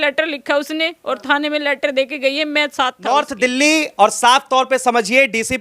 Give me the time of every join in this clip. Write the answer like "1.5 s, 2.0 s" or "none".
3.1 s

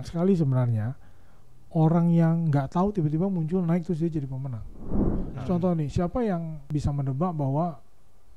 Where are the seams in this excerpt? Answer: 5.2 s, 6.7 s

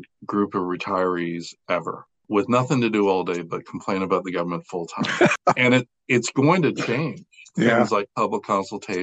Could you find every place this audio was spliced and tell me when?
2.2 s, 5.3 s

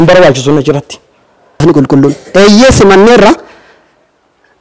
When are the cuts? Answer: 1.6 s

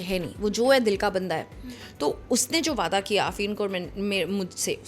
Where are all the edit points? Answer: none

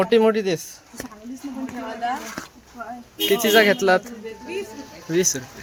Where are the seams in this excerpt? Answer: none

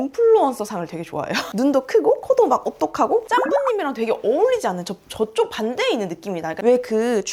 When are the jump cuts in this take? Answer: 1.4 s, 3.3 s, 6.6 s

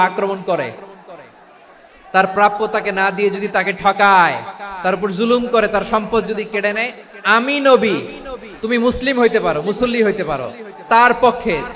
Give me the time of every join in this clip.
none

